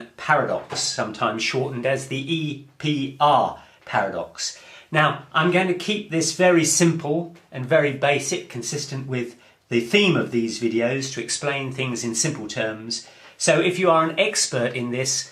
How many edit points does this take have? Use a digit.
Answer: 1